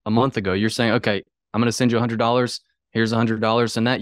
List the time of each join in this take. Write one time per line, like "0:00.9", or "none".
none